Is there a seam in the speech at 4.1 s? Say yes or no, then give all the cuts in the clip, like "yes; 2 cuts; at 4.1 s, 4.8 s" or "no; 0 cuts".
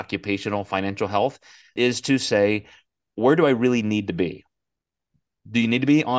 no; 1 cut; at 1.7 s